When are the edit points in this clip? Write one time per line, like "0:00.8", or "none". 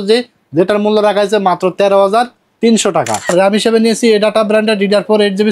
0:03.3